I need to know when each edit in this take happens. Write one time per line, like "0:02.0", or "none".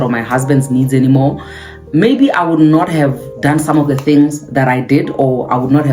none